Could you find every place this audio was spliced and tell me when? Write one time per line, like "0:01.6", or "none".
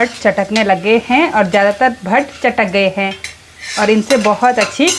none